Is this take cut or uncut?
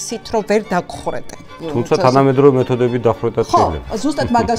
cut